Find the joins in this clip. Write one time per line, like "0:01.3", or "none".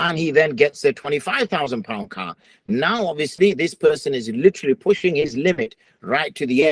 none

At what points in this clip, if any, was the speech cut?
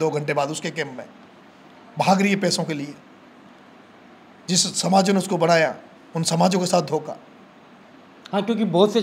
none

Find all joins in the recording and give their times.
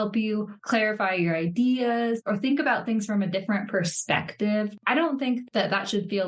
0:02.2
0:04.8

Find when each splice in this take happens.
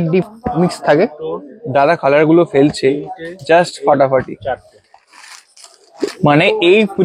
none

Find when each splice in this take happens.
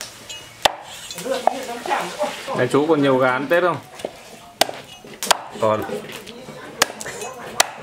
0:02.4

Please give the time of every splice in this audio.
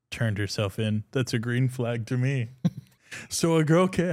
0:02.9

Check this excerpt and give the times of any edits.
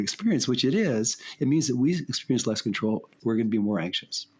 0:03.1

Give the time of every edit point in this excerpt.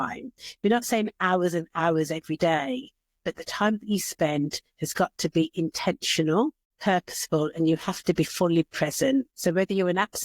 0:06.7
0:09.3

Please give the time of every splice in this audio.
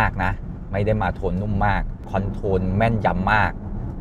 0:02.0

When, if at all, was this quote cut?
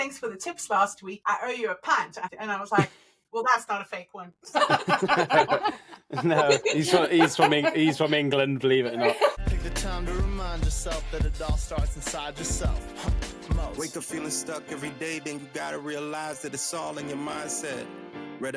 0:01.1
0:02.3
0:09.4

